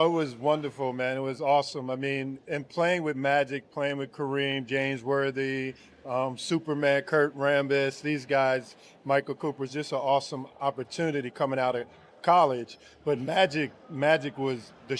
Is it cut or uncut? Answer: uncut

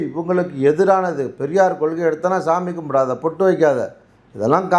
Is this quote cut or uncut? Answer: uncut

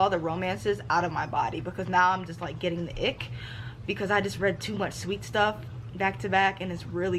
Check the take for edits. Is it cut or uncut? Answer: uncut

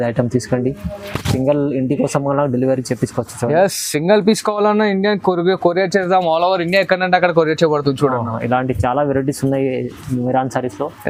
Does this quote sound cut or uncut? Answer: uncut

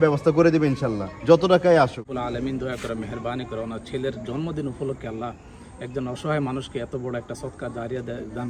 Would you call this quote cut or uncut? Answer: cut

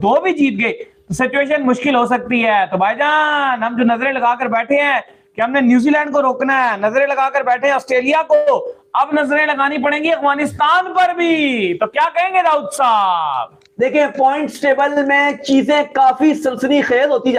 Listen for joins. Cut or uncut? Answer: uncut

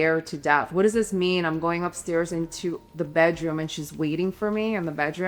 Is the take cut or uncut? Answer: uncut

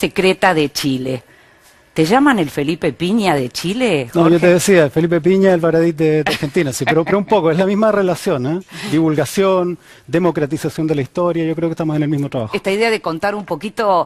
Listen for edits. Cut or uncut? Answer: uncut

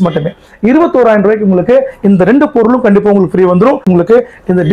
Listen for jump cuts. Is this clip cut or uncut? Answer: cut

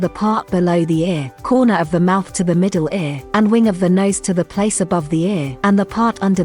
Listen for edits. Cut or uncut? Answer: cut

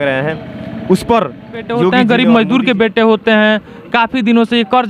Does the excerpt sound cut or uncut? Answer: cut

